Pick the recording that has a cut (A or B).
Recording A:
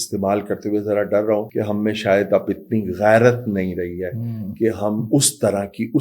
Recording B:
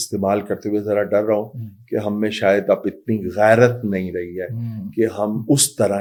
A